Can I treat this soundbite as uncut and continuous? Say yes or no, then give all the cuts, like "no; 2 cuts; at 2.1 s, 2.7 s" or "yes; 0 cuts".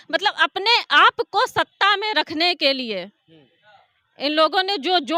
yes; 0 cuts